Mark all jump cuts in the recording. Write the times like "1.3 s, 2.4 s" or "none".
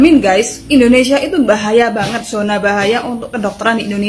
none